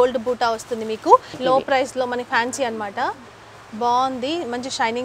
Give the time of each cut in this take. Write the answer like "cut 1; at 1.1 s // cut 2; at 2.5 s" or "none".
cut 1; at 1.3 s